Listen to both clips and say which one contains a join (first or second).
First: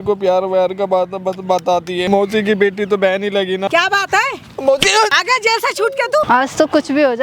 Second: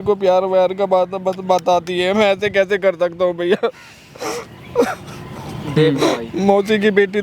first